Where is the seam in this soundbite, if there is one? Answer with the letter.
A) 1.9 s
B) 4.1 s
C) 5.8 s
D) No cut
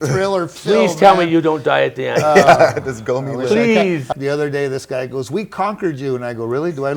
B